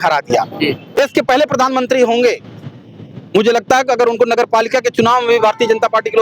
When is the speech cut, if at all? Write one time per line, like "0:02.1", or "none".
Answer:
0:01.0

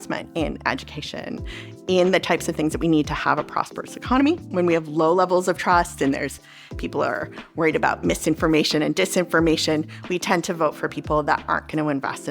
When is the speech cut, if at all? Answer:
0:04.4

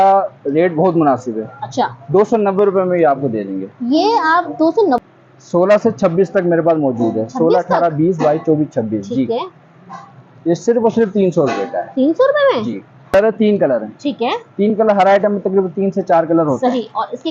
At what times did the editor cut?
0:05.0
0:13.1

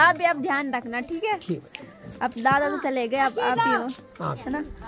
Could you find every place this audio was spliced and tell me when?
none

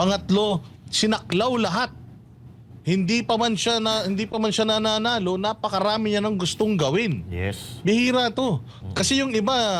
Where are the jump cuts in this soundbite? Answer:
none

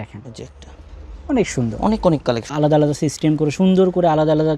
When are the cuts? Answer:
0:02.5

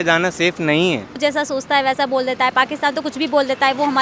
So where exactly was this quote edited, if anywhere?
0:01.2

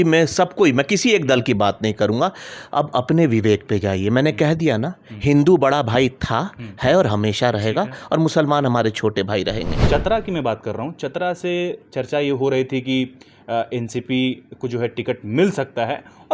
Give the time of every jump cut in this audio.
0:09.7

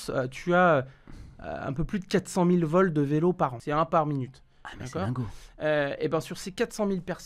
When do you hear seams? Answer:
0:03.6

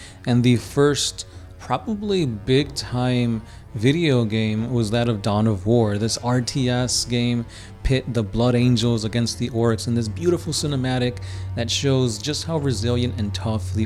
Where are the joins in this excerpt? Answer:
none

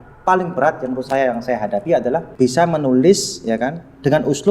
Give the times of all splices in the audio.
0:02.2

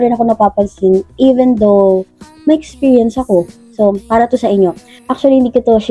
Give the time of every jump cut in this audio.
0:04.9

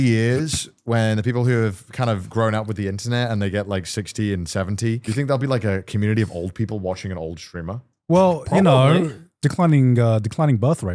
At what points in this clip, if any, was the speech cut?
0:05.1

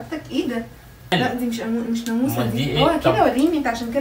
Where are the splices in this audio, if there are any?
0:01.1

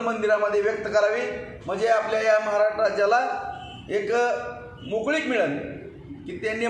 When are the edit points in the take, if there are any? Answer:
none

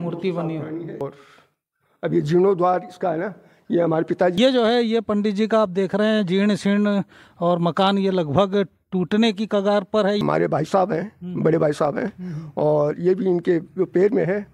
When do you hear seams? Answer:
0:01.0
0:04.3
0:10.2

